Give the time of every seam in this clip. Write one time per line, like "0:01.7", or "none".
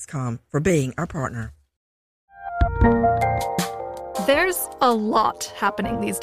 0:02.3